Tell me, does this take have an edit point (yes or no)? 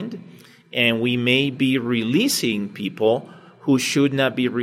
no